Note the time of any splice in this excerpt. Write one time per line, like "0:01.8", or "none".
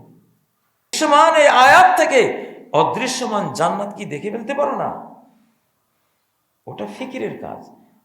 0:00.9